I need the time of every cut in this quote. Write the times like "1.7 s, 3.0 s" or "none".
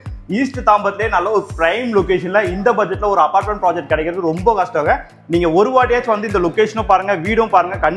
none

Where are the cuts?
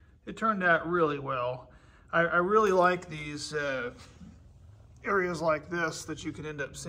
none

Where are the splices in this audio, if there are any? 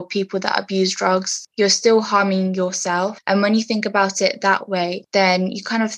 1.4 s, 3.2 s, 5.0 s

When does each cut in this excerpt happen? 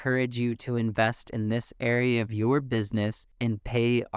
3.3 s

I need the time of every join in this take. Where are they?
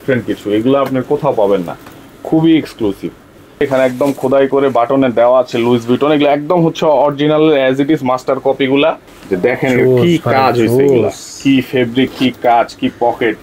3.6 s, 9.1 s

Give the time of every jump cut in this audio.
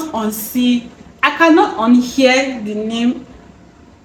none

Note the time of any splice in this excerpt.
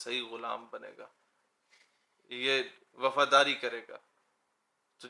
none

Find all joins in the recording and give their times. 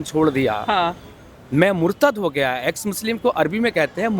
none

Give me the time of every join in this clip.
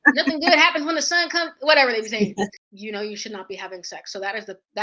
2.6 s

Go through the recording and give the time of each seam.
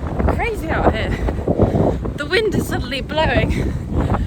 none

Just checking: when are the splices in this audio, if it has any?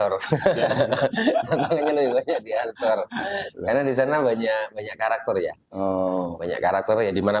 none

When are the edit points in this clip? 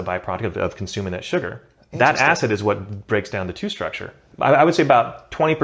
4.2 s

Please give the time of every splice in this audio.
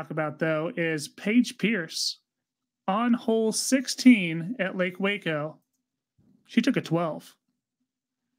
none

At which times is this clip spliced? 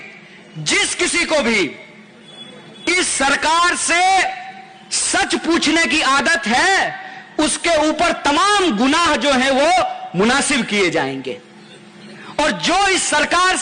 none

